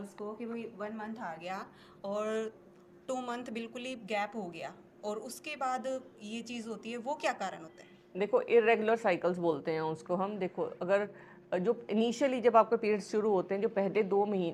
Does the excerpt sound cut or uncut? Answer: uncut